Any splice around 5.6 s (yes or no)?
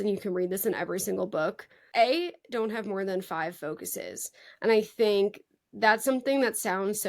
no